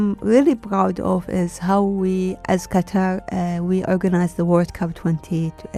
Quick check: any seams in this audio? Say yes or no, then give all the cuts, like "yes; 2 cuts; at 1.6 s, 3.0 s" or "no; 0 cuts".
no; 0 cuts